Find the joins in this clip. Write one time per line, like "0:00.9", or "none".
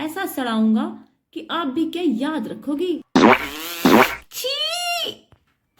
0:03.0